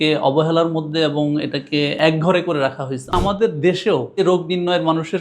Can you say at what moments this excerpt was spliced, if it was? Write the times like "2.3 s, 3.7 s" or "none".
2.0 s, 3.1 s, 4.2 s